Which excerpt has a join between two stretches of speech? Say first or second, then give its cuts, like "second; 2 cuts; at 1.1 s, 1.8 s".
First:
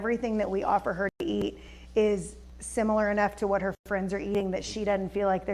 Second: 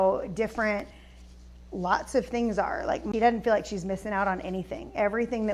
second; 1 cut; at 3.0 s